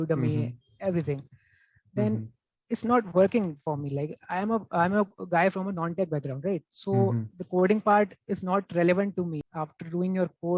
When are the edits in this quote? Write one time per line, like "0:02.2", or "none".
0:09.4